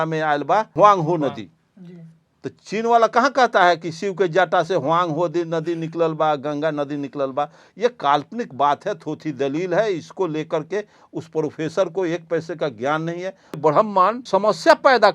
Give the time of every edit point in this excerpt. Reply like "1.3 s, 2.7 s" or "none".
0.7 s, 13.6 s, 14.2 s